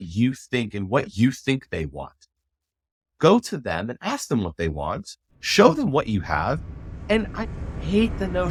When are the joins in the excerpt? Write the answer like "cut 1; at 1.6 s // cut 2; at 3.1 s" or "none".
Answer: none